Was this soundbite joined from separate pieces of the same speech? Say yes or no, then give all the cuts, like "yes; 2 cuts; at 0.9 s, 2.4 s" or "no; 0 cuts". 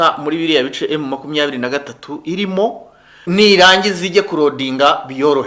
yes; 1 cut; at 3.2 s